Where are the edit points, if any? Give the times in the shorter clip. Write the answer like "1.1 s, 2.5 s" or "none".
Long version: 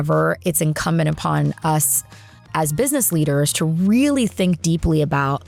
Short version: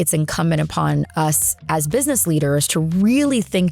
1.5 s